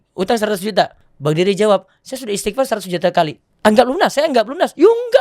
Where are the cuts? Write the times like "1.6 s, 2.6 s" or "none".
1.0 s, 3.4 s

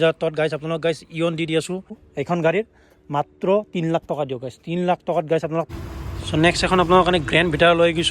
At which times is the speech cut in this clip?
2.1 s, 5.7 s

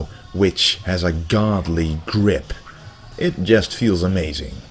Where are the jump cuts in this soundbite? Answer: 3.4 s

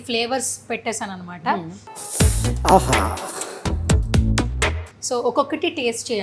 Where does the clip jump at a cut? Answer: none

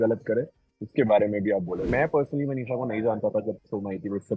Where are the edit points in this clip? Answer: 1.9 s

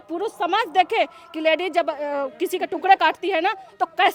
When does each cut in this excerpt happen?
none

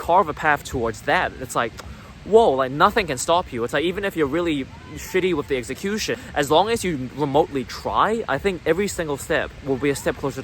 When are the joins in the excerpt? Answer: 6.2 s, 9.6 s

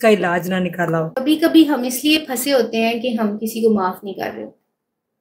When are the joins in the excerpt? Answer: 1.1 s

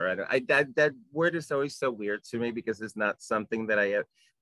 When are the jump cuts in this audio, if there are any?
none

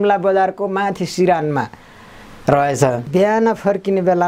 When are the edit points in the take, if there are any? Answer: 3.1 s

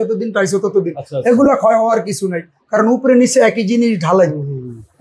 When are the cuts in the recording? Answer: none

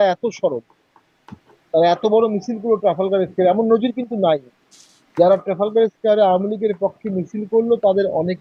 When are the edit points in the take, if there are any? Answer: none

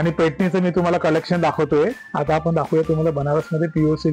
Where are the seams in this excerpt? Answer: 2.0 s

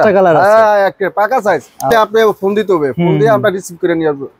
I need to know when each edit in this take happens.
1.9 s

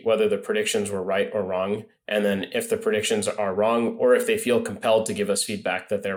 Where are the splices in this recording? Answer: none

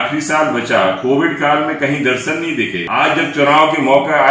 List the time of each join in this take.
2.8 s

